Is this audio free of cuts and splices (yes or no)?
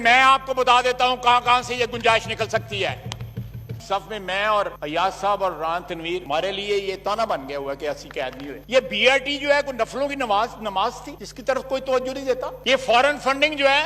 no